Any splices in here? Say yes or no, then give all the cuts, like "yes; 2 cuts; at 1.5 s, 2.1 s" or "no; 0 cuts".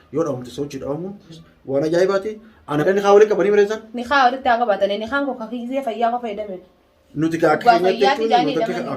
yes; 2 cuts; at 1.3 s, 2.6 s